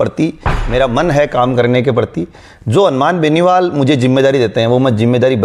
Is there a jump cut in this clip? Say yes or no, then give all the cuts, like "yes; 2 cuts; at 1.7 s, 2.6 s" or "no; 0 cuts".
no; 0 cuts